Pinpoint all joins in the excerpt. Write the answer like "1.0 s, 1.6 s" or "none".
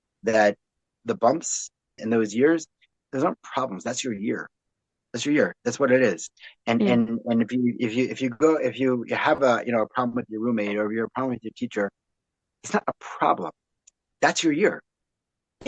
1.0 s, 2.0 s, 2.8 s